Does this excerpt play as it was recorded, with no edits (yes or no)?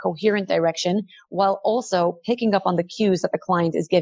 yes